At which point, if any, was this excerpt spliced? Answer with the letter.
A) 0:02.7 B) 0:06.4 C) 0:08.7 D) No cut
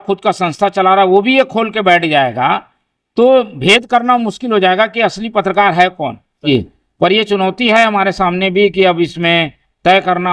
B